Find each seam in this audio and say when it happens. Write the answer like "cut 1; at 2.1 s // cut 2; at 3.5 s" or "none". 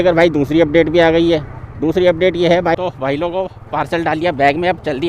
cut 1; at 2.7 s